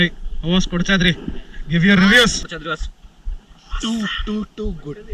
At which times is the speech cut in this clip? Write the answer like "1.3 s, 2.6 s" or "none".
2.5 s